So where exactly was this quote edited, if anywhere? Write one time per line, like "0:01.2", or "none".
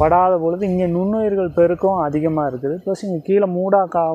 none